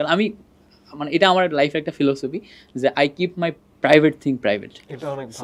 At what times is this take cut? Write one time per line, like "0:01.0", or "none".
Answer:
none

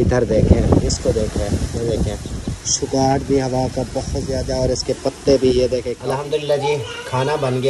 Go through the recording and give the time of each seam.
0:05.9

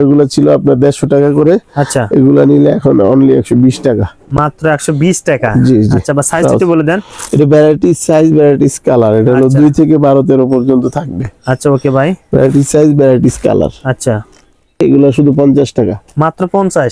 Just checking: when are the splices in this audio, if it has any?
none

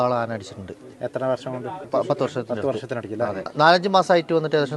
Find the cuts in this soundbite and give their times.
0:01.9
0:03.5

